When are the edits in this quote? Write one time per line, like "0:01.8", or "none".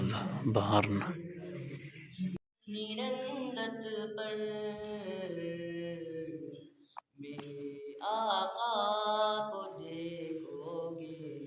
0:02.5